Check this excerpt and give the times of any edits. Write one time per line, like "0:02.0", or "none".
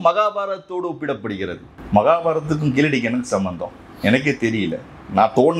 0:01.7